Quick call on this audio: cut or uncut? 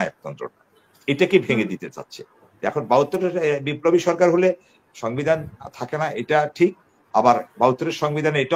uncut